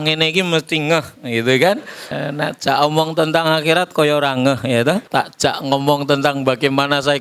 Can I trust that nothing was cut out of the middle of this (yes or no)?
no